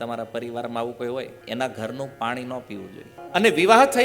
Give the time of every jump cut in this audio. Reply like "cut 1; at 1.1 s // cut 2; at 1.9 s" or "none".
cut 1; at 1.4 s // cut 2; at 3.1 s